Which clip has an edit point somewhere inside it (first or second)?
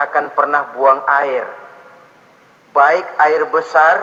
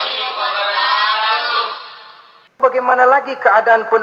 second